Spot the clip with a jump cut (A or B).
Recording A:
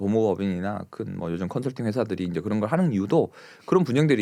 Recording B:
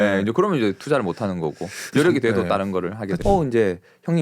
B